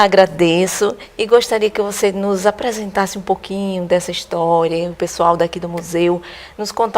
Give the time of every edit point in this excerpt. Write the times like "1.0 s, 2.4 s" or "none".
6.0 s